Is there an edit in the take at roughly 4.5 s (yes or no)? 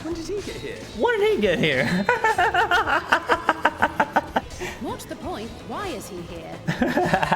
yes